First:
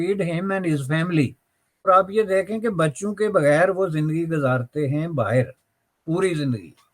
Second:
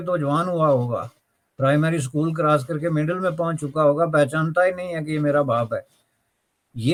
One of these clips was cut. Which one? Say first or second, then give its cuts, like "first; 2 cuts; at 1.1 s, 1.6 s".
first; 1 cut; at 1.9 s